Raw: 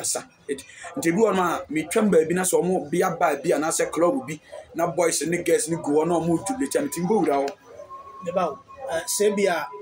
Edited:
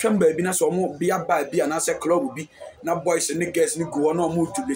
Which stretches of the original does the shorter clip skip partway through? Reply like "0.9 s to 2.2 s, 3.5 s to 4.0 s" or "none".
none